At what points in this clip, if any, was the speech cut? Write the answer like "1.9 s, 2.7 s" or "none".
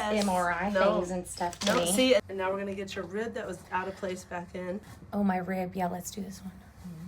2.2 s, 4.9 s